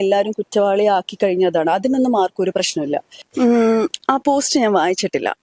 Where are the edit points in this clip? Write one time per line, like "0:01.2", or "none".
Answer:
0:03.2